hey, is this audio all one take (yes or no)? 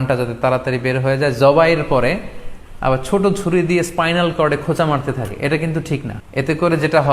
no